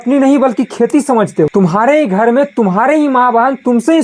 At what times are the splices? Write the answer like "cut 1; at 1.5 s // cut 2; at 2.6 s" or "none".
cut 1; at 1.5 s